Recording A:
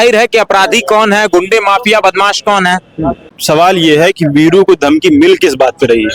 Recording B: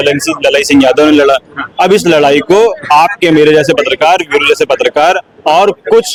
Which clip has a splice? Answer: A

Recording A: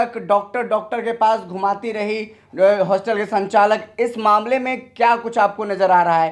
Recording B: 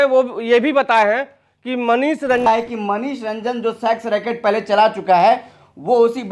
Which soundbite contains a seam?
B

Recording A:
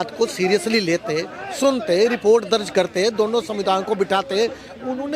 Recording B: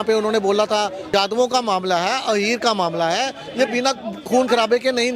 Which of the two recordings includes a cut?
B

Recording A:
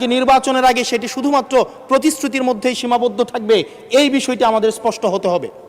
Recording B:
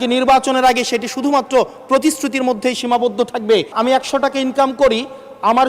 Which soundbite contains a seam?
B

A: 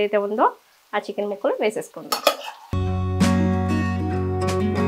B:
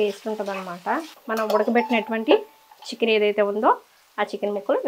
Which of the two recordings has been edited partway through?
B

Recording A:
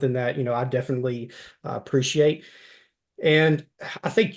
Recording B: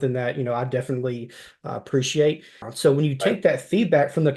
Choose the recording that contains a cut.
B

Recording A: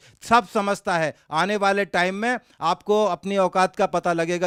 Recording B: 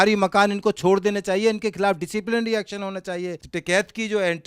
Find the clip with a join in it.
B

